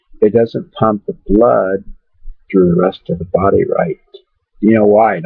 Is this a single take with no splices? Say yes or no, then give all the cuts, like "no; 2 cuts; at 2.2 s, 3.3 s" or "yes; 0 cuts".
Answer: yes; 0 cuts